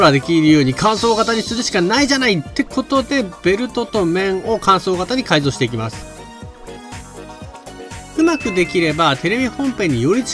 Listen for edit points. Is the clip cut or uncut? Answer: uncut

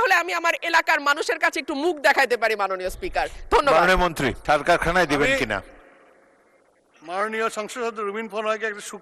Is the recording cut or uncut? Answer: cut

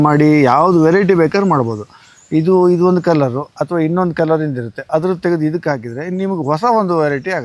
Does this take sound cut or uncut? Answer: uncut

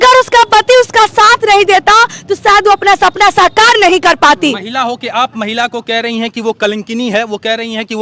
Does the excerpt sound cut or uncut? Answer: uncut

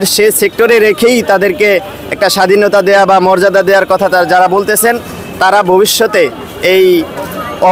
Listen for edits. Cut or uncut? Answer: uncut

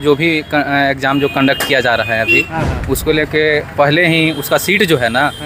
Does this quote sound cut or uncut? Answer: uncut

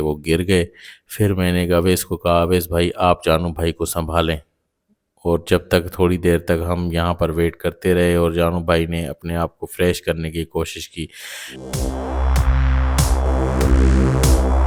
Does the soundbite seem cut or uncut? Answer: uncut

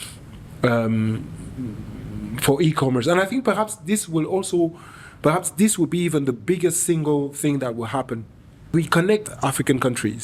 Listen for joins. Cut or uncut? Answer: cut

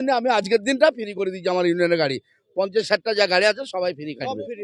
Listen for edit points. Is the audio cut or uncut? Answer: uncut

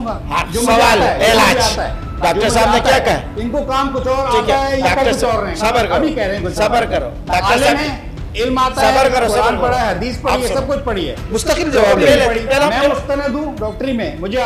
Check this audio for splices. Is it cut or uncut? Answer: uncut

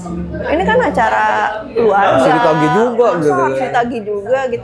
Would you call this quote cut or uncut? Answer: uncut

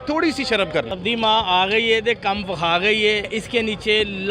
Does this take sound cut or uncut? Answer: cut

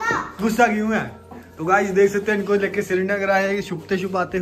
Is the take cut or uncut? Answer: uncut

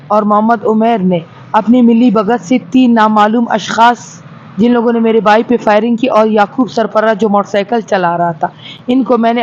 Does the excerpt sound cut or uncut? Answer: uncut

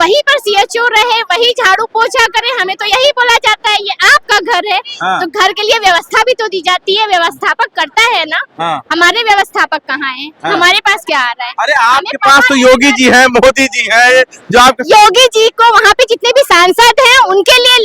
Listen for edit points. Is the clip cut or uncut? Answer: uncut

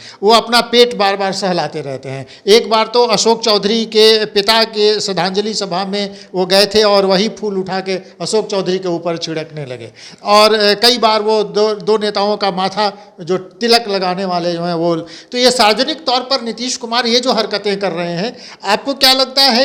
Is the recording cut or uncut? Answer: uncut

